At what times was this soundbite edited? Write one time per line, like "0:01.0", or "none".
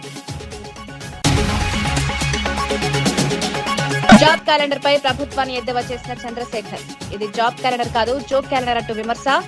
0:01.1
0:04.1